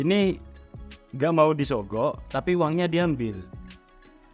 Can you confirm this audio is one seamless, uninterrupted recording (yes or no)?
no